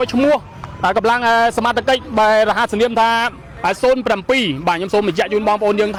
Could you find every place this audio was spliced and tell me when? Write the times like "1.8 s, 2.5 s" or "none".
none